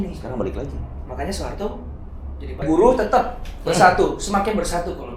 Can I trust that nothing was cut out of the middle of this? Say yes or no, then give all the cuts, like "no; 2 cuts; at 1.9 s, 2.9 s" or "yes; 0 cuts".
no; 1 cut; at 2.6 s